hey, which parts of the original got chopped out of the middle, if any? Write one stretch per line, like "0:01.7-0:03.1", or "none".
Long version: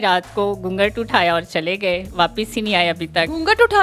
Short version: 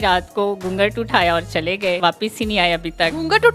0:02.0-0:02.1